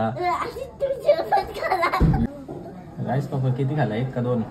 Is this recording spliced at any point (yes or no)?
yes